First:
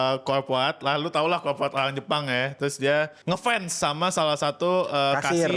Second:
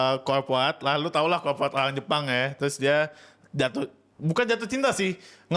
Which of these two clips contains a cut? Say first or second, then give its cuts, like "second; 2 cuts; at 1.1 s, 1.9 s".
first; 1 cut; at 3.2 s